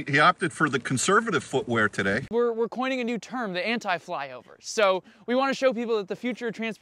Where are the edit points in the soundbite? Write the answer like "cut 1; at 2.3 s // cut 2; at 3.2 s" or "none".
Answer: cut 1; at 2.3 s